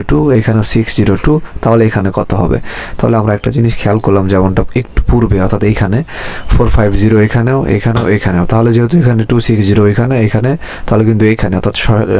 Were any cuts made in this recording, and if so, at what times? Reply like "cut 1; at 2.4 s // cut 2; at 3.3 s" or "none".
none